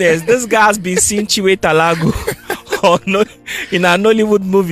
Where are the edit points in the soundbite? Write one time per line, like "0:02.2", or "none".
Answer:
none

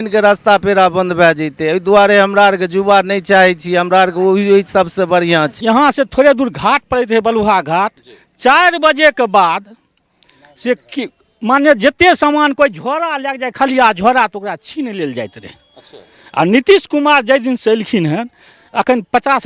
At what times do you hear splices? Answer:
0:05.5

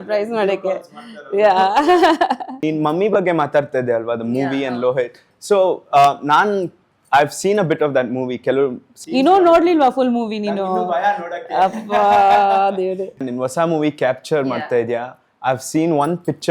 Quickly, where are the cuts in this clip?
0:02.5
0:13.2

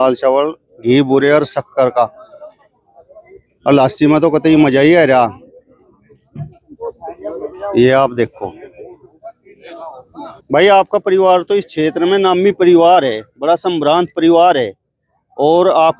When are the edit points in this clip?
none

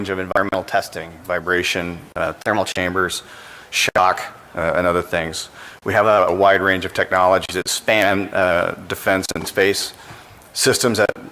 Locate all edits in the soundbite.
0:06.2

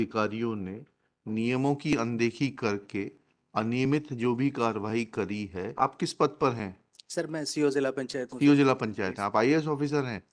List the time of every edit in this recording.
0:05.7

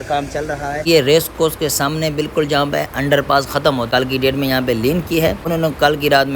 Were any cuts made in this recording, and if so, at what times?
0:00.8
0:03.9
0:05.4

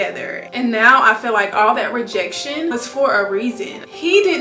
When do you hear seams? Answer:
0:02.7

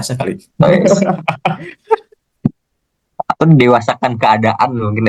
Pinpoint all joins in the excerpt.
none

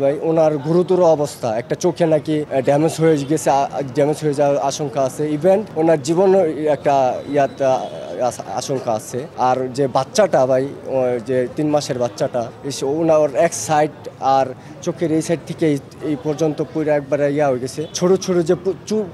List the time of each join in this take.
0:02.5
0:05.7
0:09.3
0:12.6
0:17.8

